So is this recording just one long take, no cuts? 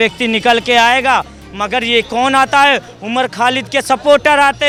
yes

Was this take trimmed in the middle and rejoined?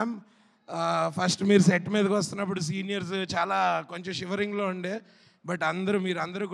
no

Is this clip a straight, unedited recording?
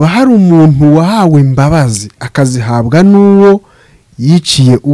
yes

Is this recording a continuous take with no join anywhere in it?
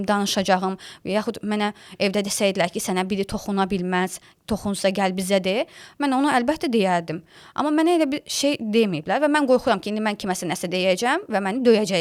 yes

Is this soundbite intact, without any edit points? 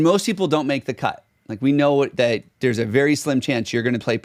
yes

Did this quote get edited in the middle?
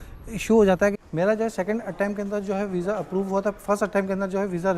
yes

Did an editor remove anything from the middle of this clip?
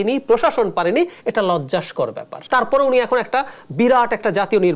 yes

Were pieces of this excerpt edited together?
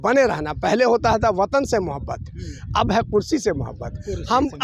no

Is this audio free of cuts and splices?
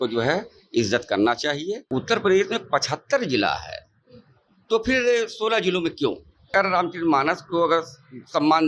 no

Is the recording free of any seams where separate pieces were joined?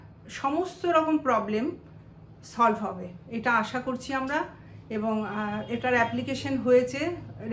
yes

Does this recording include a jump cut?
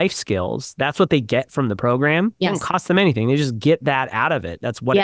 no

